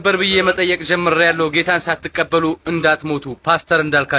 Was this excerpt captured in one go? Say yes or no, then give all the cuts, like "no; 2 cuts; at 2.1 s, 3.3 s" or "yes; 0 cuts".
yes; 0 cuts